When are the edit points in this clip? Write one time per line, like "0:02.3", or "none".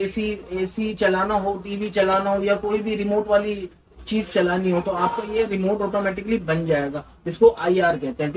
none